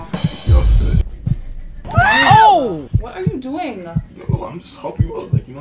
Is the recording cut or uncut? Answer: cut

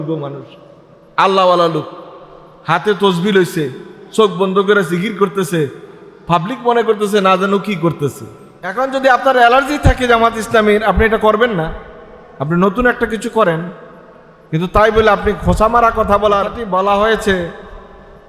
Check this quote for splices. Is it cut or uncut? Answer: cut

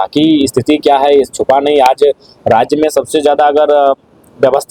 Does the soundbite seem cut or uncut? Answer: uncut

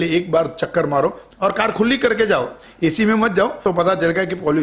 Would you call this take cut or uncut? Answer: cut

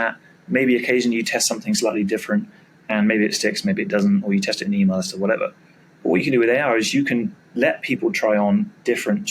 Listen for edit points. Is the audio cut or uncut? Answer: uncut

